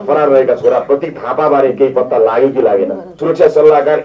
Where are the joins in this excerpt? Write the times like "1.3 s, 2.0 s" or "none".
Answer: 3.1 s